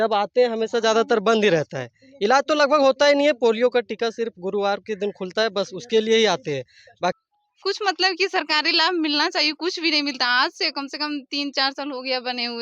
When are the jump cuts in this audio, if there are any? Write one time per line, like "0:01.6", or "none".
0:07.1